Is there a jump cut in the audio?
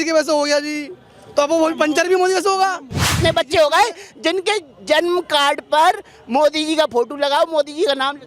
yes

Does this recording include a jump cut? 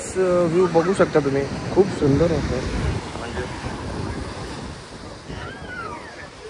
no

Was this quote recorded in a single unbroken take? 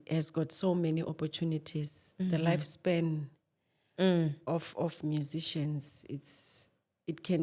yes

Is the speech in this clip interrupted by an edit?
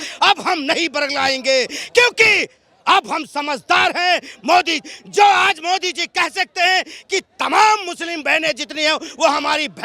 no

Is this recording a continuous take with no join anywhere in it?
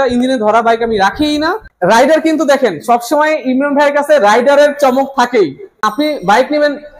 no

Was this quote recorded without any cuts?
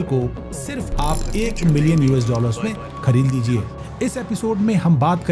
no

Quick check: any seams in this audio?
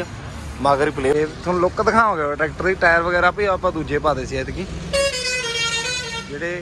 yes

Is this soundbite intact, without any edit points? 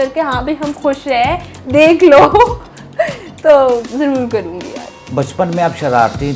yes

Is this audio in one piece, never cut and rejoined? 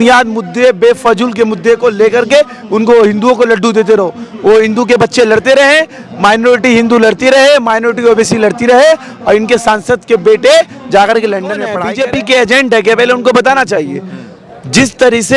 no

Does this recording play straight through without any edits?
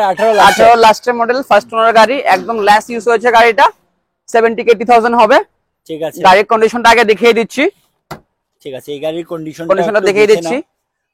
yes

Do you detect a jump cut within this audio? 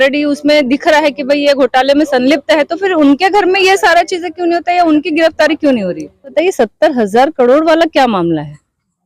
yes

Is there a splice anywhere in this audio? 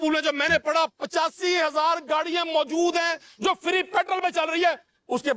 no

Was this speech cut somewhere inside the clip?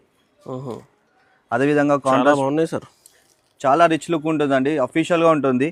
no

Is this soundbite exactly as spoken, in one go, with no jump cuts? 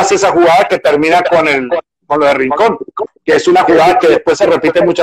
yes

